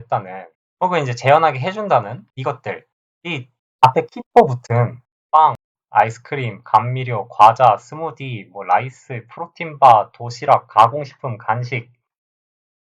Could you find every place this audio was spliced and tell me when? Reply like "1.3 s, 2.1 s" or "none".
2.3 s